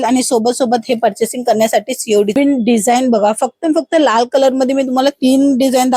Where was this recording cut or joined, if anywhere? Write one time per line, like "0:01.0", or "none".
0:02.4